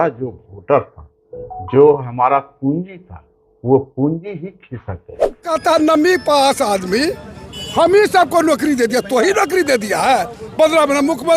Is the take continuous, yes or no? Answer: no